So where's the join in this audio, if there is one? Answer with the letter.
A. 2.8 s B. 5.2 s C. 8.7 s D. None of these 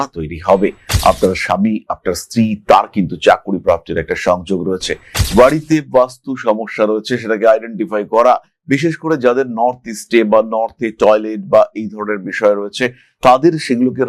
B